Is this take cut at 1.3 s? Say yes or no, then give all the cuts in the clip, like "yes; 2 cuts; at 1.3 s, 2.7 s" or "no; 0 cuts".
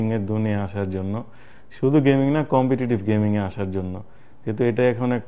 no; 0 cuts